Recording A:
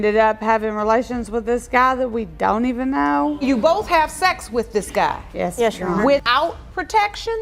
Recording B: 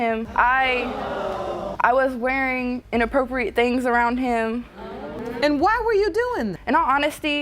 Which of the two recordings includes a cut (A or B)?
B